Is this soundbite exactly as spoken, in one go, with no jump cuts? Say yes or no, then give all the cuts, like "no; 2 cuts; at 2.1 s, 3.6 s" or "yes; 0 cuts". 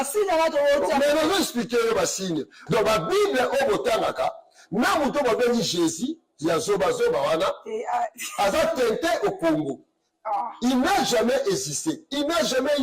no; 1 cut; at 2.6 s